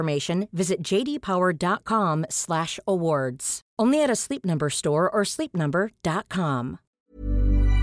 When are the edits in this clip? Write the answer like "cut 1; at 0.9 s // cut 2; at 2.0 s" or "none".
cut 1; at 6.9 s